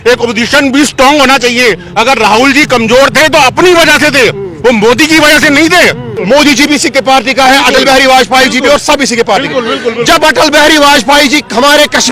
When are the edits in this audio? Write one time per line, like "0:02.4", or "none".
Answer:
0:06.1